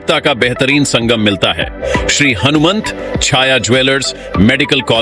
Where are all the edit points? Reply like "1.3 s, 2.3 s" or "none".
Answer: 1.8 s